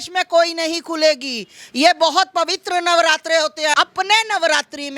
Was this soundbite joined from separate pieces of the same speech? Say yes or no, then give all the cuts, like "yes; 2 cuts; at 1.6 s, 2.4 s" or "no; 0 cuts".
yes; 1 cut; at 3.7 s